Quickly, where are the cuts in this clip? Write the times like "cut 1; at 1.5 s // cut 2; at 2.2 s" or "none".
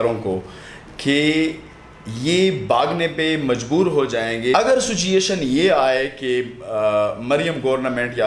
cut 1; at 4.5 s